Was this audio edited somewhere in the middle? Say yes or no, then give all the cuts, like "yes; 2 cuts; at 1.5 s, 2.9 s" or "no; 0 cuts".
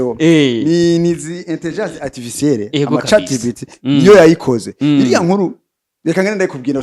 no; 0 cuts